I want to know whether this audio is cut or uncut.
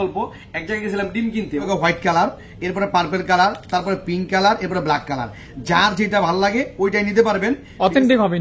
cut